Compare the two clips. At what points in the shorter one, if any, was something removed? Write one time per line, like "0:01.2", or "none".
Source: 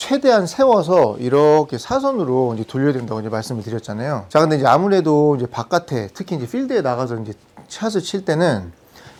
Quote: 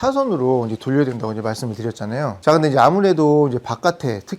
none